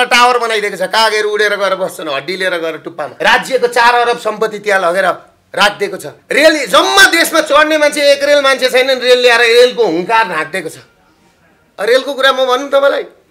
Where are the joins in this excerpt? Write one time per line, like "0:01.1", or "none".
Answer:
0:03.1
0:06.1